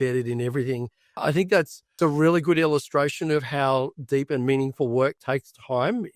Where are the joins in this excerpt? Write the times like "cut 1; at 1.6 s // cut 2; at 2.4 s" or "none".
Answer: cut 1; at 2.0 s